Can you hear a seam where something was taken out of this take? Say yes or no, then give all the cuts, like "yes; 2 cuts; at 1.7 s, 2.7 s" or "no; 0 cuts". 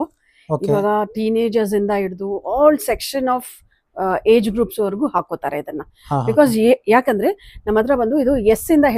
no; 0 cuts